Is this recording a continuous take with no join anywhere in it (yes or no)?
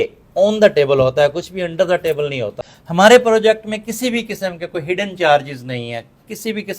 no